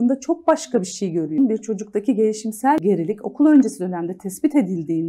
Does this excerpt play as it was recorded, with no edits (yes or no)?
no